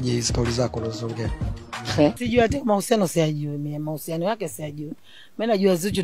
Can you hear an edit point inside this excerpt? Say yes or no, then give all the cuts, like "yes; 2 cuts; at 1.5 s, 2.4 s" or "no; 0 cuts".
yes; 1 cut; at 2.2 s